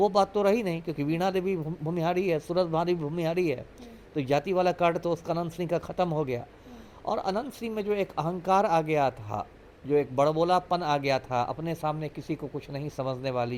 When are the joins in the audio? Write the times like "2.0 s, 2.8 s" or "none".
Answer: none